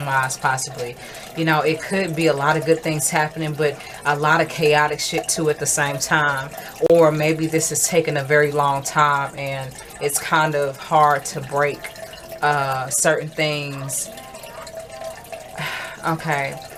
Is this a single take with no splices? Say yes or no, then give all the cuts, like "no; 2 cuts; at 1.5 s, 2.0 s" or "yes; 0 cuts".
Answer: yes; 0 cuts